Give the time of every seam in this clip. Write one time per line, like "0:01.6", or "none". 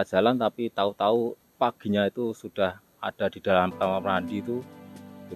none